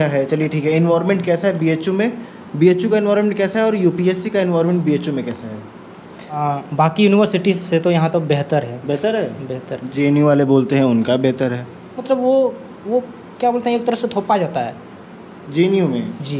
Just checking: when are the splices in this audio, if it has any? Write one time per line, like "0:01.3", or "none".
0:06.4
0:12.0